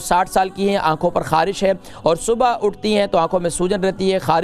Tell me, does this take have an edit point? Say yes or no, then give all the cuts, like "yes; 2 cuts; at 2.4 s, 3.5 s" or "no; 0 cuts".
no; 0 cuts